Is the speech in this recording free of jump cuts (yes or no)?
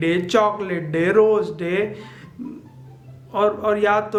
yes